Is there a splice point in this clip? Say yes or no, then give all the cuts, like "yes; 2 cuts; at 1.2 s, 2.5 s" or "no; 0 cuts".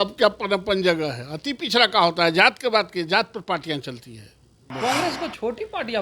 yes; 1 cut; at 4.7 s